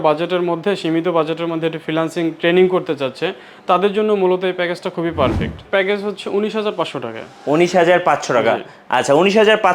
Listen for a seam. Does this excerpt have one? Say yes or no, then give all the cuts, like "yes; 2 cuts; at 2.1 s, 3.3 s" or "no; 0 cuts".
yes; 1 cut; at 5.6 s